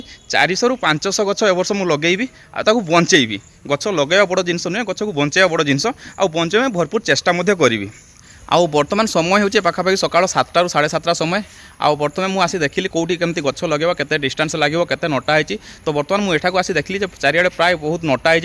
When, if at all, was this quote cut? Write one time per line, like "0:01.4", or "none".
none